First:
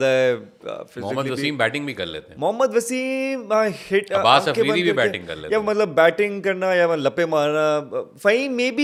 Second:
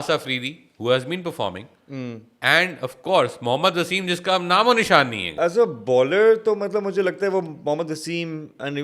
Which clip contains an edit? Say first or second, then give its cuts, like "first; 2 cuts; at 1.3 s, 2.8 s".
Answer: second; 1 cut; at 5.4 s